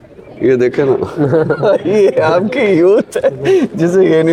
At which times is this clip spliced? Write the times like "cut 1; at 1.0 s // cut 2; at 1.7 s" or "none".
none